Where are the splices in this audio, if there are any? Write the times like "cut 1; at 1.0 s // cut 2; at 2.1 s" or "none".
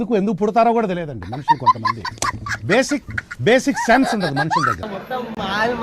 cut 1; at 4.9 s

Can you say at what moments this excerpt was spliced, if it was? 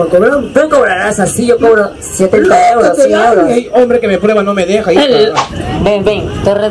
cut 1; at 5.4 s

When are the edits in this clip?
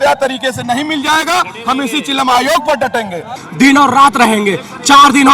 cut 1; at 3.4 s

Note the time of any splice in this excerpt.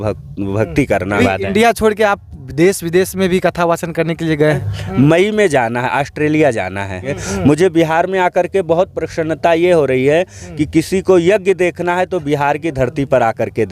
cut 1; at 1.1 s // cut 2; at 4.6 s // cut 3; at 7.2 s

